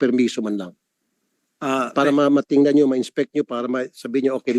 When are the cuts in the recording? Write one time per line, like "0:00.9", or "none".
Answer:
none